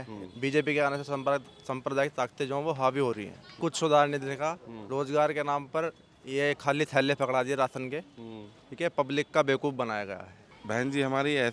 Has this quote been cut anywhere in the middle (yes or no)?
yes